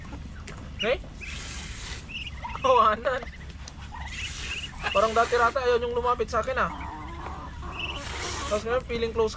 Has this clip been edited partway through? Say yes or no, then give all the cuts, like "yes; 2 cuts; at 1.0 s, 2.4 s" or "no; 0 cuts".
no; 0 cuts